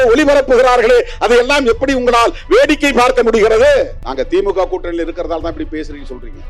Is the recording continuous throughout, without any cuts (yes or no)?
no